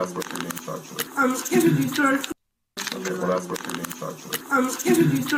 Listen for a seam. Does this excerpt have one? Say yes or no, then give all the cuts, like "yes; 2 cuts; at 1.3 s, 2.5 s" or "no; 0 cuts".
yes; 3 cuts; at 1.0 s, 2.6 s, 4.3 s